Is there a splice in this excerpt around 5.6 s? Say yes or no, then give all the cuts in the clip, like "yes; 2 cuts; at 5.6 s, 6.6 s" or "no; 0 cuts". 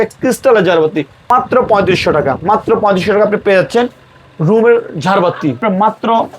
yes; 2 cuts; at 1.3 s, 5.6 s